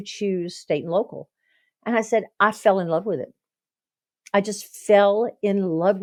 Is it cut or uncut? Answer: uncut